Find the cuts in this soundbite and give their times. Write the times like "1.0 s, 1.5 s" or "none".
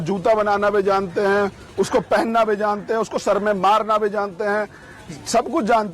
none